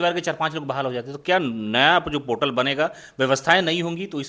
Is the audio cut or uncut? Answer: uncut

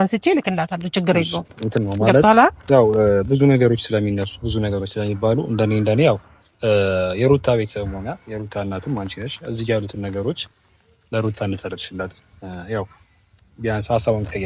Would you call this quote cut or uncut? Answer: uncut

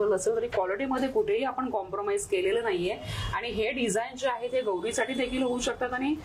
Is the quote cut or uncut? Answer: uncut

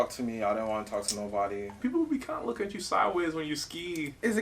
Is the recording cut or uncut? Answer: cut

